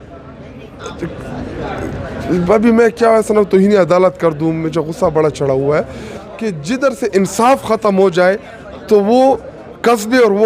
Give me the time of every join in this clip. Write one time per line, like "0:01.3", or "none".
0:06.2